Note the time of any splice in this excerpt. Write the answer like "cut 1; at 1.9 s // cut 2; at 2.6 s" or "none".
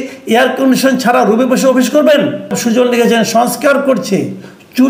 cut 1; at 2.6 s